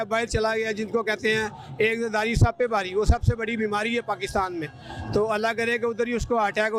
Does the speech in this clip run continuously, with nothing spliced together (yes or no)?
yes